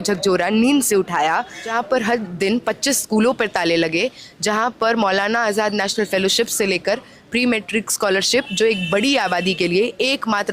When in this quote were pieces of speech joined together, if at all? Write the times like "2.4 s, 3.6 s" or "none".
1.6 s

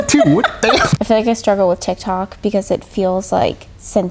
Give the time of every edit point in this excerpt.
0.9 s

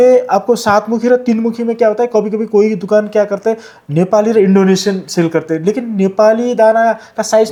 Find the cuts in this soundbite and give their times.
none

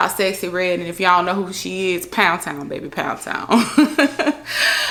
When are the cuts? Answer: none

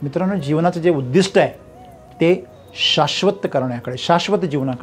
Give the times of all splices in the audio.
none

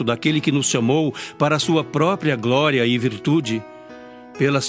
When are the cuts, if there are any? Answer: none

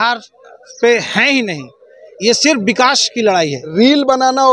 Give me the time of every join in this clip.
3.6 s

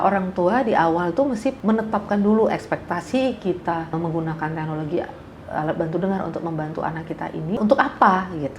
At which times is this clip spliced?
1.6 s, 3.9 s, 7.6 s

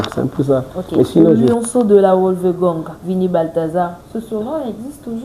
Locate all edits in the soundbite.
1.4 s

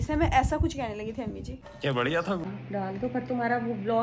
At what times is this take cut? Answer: 2.5 s

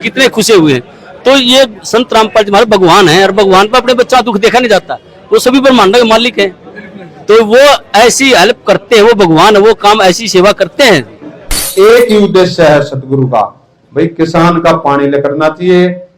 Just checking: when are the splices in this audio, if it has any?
11.7 s

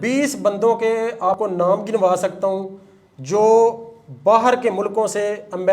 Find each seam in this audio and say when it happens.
1.3 s

